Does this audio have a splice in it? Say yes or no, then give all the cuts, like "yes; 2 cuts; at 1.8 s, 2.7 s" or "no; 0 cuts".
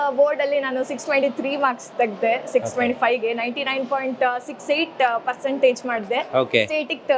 no; 0 cuts